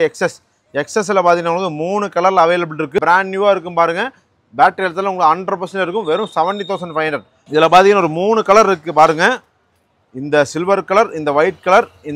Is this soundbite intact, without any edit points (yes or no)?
no